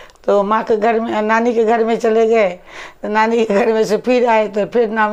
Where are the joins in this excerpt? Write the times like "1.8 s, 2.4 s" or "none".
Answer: none